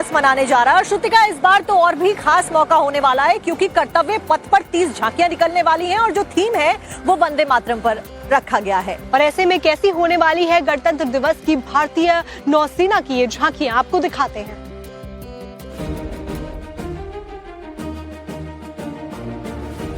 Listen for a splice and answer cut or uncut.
cut